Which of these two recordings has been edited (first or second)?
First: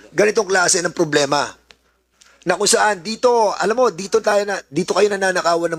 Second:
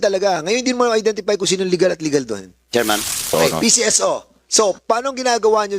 second